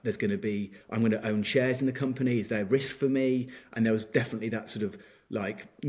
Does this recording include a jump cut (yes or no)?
no